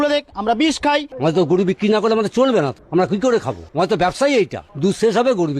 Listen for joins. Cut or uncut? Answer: cut